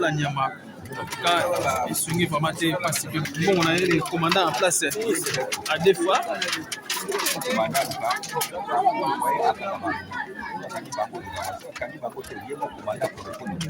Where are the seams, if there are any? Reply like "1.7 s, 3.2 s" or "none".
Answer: 3.2 s